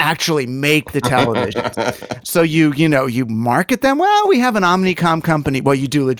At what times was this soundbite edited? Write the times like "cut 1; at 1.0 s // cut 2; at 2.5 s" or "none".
cut 1; at 2.1 s